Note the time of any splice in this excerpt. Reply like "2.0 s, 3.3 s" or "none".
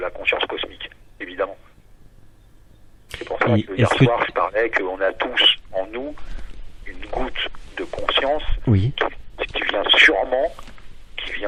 none